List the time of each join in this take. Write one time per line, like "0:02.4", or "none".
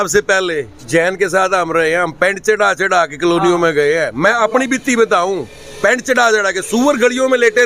none